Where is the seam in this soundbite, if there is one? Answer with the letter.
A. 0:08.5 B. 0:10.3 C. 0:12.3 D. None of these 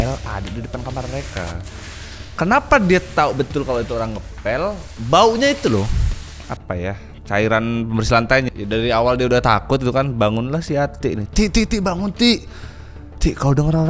A